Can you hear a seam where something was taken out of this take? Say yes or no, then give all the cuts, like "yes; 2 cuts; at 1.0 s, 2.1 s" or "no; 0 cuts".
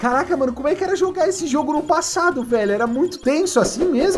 yes; 1 cut; at 3.2 s